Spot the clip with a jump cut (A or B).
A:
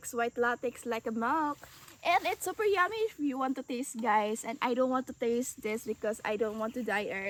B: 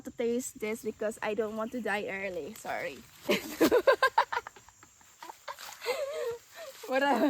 B